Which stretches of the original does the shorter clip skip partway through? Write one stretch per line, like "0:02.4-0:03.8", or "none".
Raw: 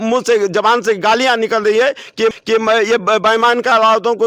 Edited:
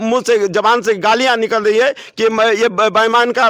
0:02.2-0:02.5